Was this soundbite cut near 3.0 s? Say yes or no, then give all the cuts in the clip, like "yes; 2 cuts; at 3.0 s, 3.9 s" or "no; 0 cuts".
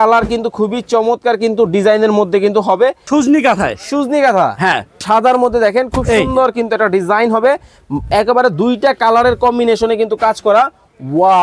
yes; 2 cuts; at 3.0 s, 5.0 s